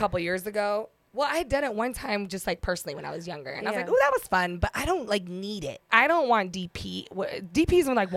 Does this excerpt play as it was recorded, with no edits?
no; 1 cut; at 5.9 s

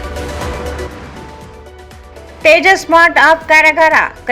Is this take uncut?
yes; 0 cuts

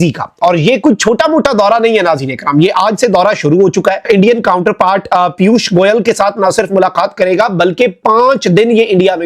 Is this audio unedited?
no; 1 cut; at 4.0 s

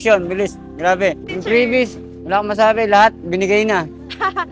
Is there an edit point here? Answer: yes; 1 cut; at 1.3 s

